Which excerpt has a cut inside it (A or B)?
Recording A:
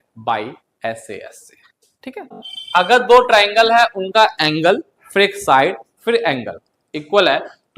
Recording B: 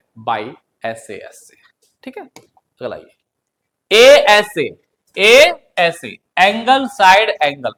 A